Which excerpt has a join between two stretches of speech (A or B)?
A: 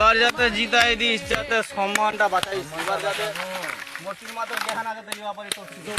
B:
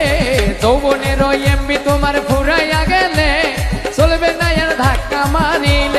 B